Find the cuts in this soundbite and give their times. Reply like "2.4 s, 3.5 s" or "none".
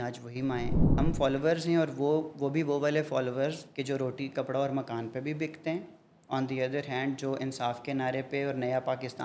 0.9 s